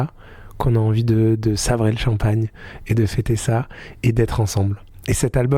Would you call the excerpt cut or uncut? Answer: uncut